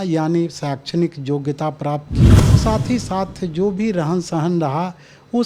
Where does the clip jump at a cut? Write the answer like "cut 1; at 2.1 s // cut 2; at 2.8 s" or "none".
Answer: cut 1; at 2.5 s